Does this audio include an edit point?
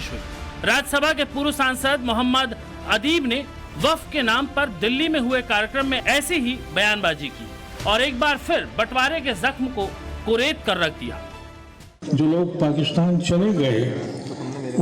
no; 0 cuts

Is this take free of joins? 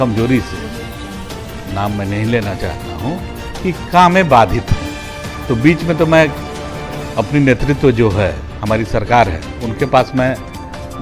yes; 0 cuts

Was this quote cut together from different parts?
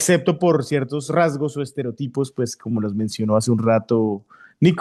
no; 0 cuts

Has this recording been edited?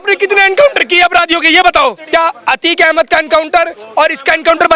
yes; 1 cut; at 2.0 s

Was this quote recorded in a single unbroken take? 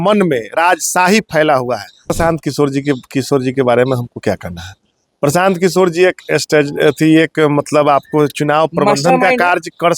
no; 1 cut; at 2.1 s

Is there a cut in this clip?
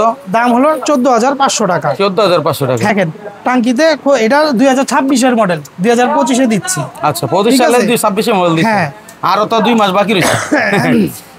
yes; 1 cut; at 2.9 s

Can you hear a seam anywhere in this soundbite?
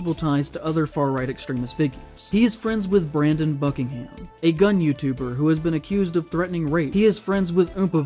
yes; 2 cuts; at 2.3 s, 6.9 s

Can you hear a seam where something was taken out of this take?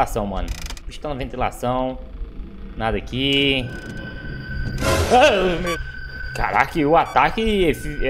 yes; 1 cut; at 5.7 s

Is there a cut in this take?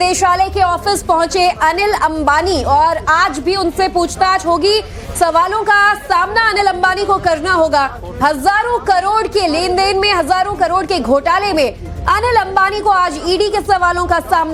no; 0 cuts

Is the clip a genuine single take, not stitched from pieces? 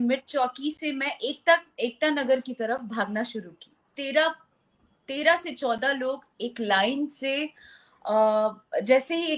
no; 1 cut; at 4.0 s

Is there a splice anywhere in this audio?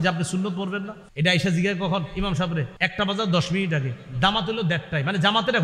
yes; 2 cuts; at 1.0 s, 2.8 s

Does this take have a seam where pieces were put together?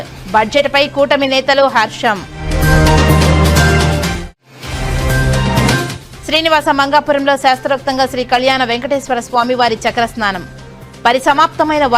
no; 0 cuts

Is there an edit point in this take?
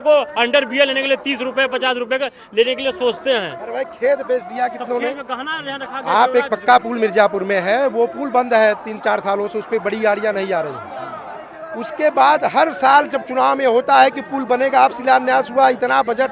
no; 0 cuts

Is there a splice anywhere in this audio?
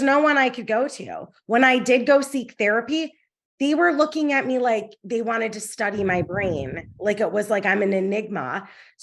no; 0 cuts

